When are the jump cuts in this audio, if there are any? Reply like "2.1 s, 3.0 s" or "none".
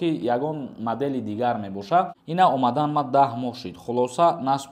2.2 s

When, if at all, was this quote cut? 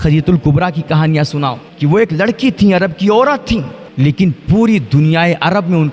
1.7 s, 3.8 s

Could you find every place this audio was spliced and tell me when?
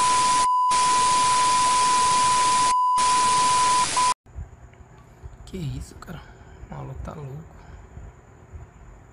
4.2 s

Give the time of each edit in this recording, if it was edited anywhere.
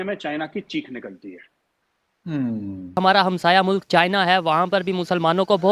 2.8 s

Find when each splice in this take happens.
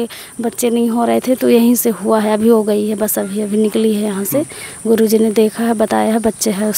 none

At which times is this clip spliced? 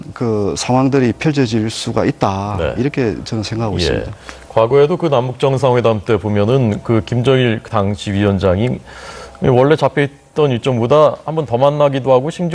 none

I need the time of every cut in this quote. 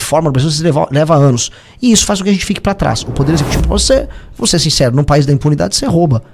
3.6 s

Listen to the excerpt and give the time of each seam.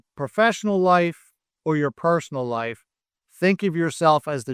none

